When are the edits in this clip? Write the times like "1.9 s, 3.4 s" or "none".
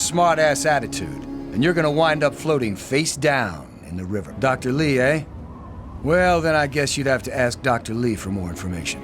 4.3 s